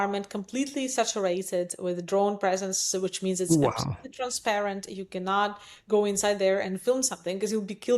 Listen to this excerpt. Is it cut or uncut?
uncut